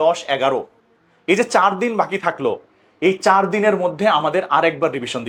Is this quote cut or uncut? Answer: uncut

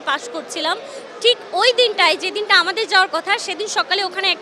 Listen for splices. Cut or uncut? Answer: uncut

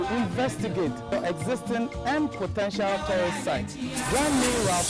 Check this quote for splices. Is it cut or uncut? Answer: uncut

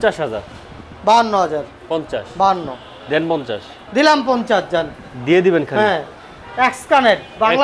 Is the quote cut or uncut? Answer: uncut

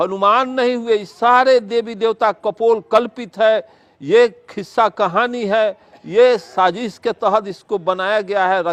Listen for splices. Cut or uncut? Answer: uncut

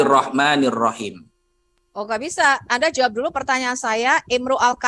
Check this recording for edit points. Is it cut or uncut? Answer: uncut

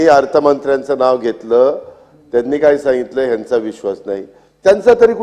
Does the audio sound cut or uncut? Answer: uncut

